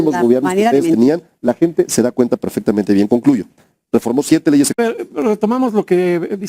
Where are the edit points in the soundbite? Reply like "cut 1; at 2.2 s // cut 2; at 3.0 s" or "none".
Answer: cut 1; at 4.8 s